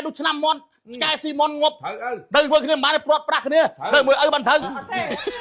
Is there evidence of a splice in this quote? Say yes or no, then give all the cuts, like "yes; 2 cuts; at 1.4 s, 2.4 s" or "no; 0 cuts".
no; 0 cuts